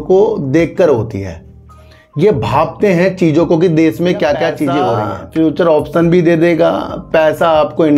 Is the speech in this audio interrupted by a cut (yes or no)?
yes